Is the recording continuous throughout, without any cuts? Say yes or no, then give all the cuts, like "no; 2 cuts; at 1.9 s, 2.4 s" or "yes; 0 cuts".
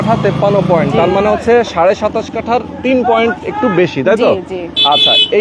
yes; 0 cuts